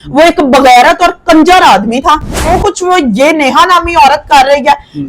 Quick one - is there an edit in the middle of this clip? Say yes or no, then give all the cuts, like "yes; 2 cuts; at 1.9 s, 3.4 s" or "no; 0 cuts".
yes; 1 cut; at 2.5 s